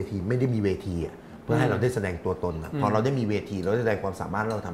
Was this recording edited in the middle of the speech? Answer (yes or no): no